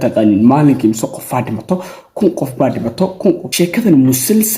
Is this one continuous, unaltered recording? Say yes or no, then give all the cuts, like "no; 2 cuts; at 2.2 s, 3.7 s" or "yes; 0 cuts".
no; 1 cut; at 3.5 s